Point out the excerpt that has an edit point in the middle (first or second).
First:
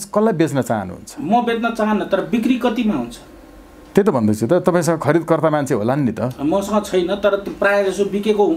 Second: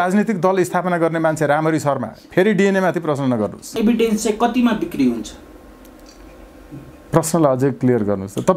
second